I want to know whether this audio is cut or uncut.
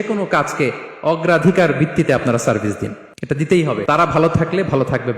cut